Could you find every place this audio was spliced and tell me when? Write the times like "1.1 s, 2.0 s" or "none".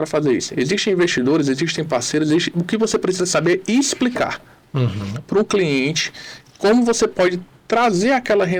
none